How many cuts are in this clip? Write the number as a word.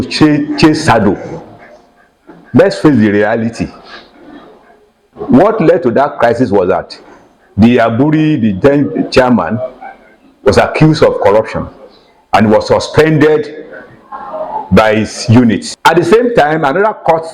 one